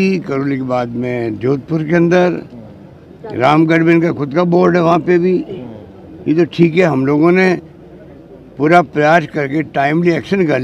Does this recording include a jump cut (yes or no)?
no